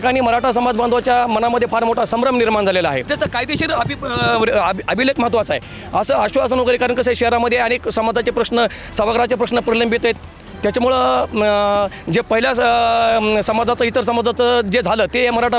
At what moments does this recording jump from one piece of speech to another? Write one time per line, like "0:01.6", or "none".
0:03.1